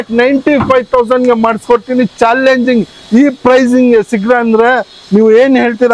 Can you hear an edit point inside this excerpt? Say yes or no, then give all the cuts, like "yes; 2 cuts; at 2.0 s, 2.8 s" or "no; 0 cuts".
no; 0 cuts